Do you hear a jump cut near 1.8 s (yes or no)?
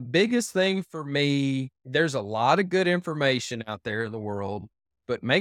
yes